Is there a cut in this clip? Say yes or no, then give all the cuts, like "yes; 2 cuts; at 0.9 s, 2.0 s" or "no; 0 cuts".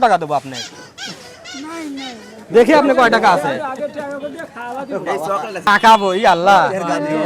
yes; 1 cut; at 5.7 s